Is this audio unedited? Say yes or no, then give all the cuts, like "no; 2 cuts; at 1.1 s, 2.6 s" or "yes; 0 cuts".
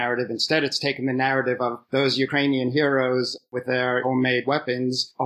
yes; 0 cuts